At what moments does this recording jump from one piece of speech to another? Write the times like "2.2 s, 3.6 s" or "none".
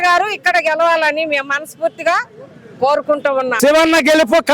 3.5 s